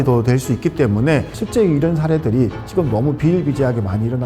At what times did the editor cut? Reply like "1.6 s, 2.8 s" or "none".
1.3 s